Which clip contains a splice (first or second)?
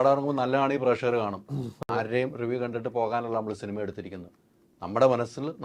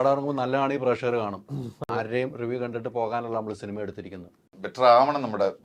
second